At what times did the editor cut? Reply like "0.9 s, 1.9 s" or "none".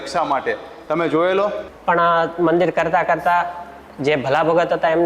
1.7 s